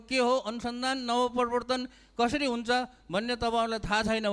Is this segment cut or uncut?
uncut